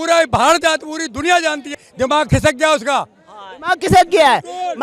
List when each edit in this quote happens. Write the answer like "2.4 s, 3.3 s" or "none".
none